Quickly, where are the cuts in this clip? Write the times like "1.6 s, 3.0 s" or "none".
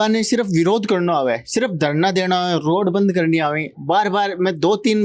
none